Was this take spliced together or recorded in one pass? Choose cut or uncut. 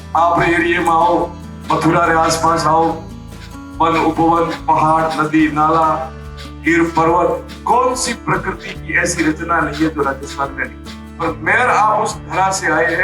cut